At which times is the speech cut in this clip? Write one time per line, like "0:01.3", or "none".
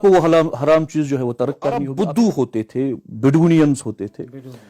0:01.9